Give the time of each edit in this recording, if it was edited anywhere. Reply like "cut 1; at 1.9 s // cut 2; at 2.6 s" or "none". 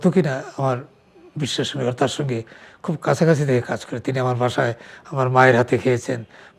none